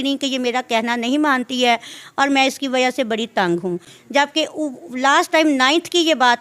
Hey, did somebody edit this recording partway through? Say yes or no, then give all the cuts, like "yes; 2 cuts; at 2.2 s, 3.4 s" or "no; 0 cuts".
no; 0 cuts